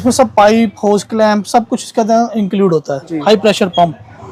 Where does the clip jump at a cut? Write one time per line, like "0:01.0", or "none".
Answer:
0:03.0

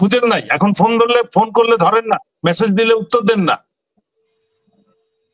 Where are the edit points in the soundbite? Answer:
none

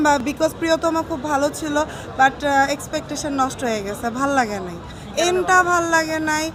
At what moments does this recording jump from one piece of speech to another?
none

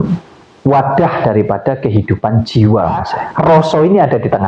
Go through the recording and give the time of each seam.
0:03.2

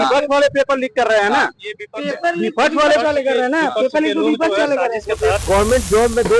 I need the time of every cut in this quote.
0:05.4

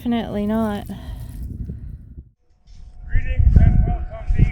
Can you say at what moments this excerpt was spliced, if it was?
0:02.2

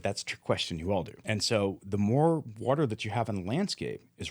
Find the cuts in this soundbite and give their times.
0:01.2

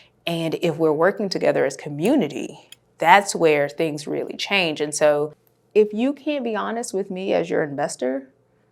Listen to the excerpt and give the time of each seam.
0:05.5

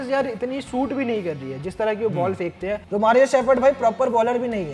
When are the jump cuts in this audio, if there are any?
0:02.8

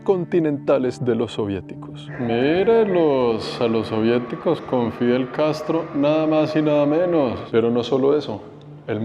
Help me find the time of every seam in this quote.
0:02.0
0:07.4

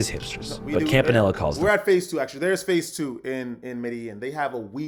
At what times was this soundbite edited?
none

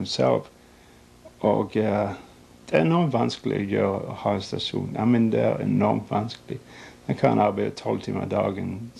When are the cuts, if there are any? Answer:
none

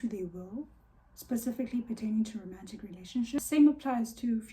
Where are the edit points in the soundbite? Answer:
0:03.4

